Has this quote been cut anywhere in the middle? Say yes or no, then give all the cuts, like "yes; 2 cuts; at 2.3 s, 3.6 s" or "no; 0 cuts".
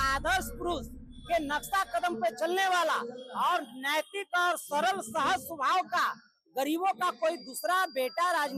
no; 0 cuts